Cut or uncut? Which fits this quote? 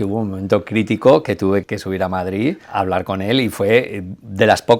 cut